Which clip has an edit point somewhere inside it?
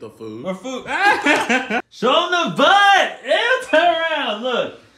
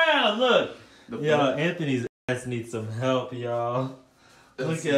first; 1 cut; at 1.9 s

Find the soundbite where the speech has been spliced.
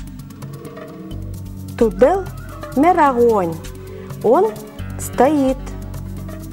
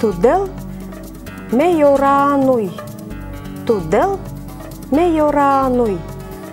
first; 1 cut; at 5.6 s

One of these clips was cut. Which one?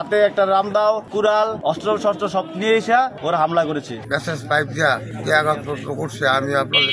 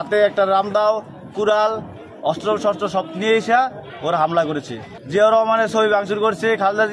first; 4 cuts; at 1.3 s, 3.2 s, 4.1 s, 5.1 s

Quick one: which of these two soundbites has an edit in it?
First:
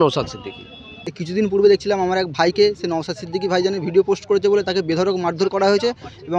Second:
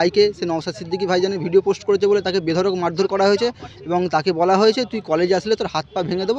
first; 1 cut; at 0.9 s

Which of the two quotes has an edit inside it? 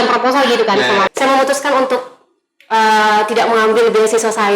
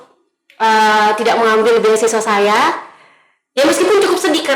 first; 1 cut; at 1.1 s

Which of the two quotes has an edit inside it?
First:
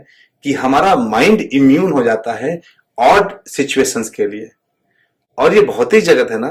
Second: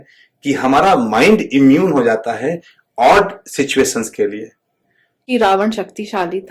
second; 1 cut; at 5.1 s

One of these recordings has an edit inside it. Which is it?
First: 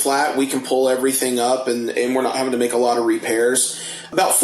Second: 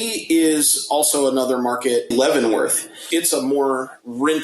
second; 2 cuts; at 2.1 s, 2.9 s

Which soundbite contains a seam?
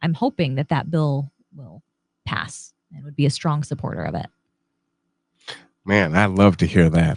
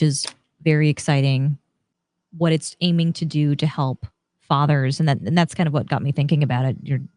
second; 1 cut; at 1.8 s

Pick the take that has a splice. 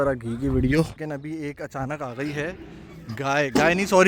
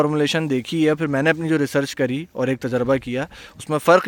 first; 1 cut; at 1.0 s

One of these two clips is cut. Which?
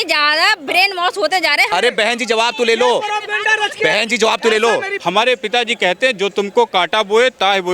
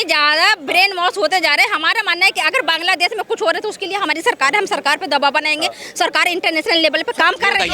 first; 2 cuts; at 1.7 s, 4.9 s

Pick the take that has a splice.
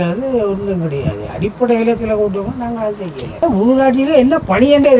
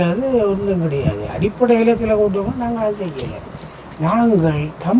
first; 1 cut; at 3.4 s

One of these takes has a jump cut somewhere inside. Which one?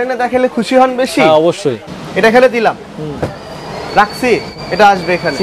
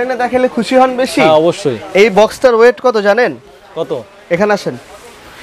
first; 2 cuts; at 1.8 s, 4.5 s

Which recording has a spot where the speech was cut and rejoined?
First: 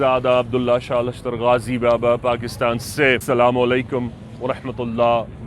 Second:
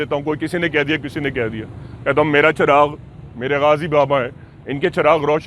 first; 1 cut; at 3.2 s

